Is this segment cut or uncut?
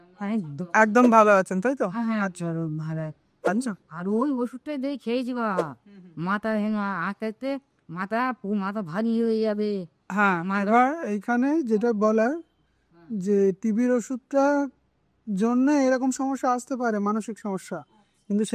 uncut